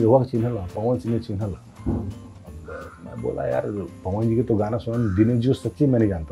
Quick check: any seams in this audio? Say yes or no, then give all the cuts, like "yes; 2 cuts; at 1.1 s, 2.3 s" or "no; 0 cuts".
no; 0 cuts